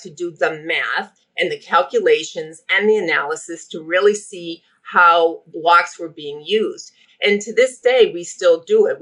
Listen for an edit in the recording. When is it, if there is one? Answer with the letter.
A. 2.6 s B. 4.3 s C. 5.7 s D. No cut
D